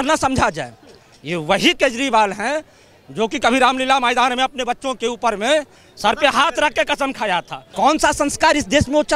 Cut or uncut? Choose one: cut